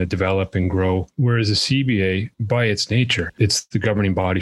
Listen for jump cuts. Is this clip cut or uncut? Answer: cut